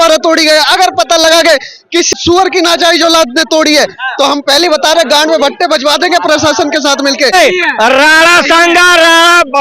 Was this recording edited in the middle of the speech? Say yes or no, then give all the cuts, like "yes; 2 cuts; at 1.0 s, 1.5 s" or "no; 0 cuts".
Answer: yes; 2 cuts; at 2.1 s, 7.3 s